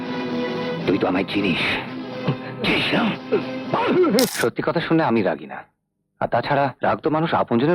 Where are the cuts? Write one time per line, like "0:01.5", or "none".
0:04.3
0:06.8

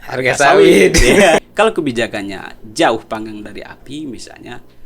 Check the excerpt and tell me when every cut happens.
0:01.4

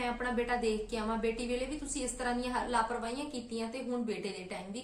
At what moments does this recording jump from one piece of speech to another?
none

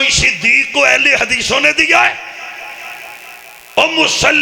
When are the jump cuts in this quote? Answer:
none

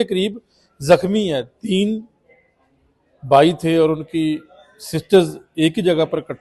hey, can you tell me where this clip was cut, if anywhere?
none

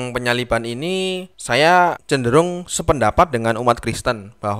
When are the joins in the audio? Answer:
0:01.3
0:02.0

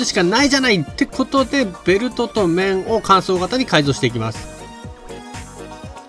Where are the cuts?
none

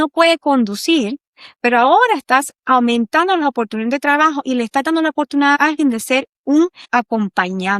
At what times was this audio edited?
0:06.8

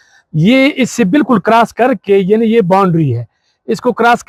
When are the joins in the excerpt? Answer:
none

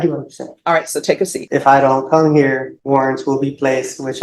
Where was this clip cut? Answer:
0:01.4
0:02.7

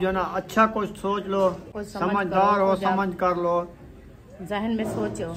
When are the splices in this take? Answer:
0:01.8

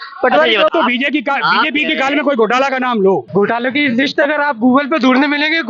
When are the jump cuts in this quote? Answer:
0:00.7
0:03.2

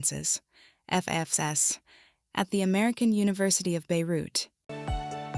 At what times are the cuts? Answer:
none

